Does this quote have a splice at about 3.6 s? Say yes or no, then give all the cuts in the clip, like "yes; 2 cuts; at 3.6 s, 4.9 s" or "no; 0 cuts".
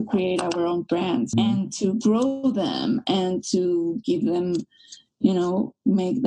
no; 1 cut; at 1.3 s